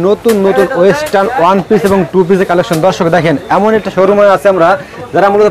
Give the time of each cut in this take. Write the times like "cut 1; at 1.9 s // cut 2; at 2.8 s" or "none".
none